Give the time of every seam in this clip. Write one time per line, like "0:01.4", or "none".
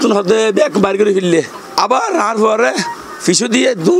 0:01.6